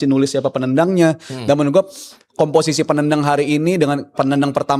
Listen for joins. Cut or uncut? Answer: uncut